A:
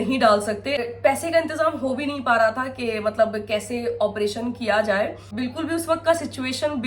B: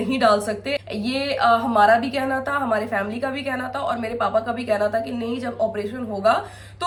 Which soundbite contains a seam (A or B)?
A